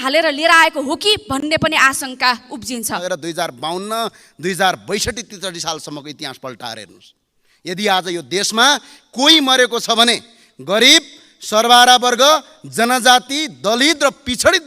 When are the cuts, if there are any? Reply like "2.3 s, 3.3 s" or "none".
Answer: 3.0 s